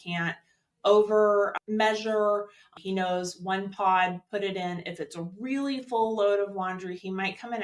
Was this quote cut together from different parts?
yes; 2 cuts; at 1.6 s, 2.7 s

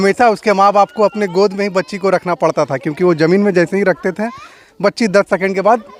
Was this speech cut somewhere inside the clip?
no; 0 cuts

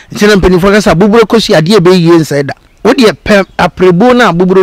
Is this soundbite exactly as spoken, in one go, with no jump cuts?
no; 1 cut; at 2.6 s

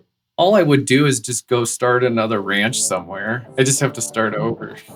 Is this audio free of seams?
yes; 0 cuts

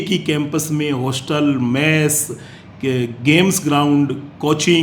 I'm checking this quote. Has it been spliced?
no; 0 cuts

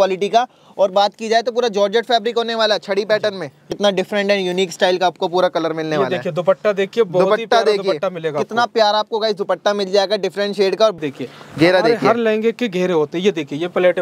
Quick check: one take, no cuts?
no; 2 cuts; at 3.7 s, 11.0 s

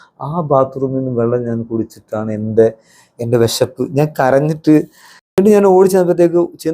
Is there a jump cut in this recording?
yes; 1 cut; at 5.4 s

